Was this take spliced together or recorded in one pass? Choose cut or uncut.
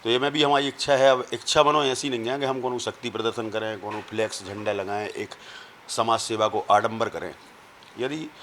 uncut